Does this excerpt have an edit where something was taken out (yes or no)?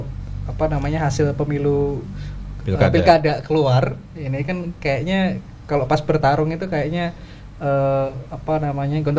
no